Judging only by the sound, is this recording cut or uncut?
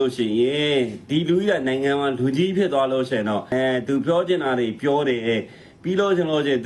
uncut